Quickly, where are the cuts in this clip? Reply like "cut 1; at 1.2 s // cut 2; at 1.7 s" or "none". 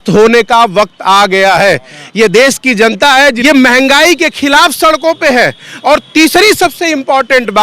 cut 1; at 3.4 s